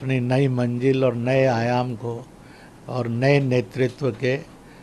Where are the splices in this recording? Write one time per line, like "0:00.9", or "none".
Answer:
none